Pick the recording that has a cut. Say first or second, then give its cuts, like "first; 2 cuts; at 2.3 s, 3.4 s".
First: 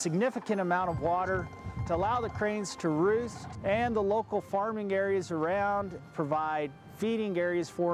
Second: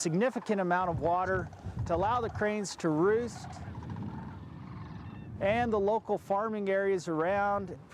first; 1 cut; at 3.4 s